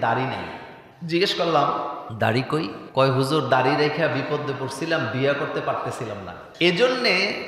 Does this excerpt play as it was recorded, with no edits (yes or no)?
yes